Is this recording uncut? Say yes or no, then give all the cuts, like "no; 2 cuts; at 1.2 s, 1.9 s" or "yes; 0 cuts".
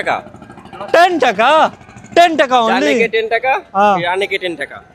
yes; 0 cuts